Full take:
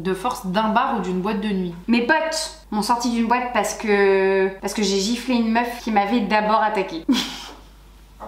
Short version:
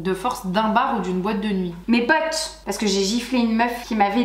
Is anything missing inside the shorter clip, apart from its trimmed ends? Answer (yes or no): yes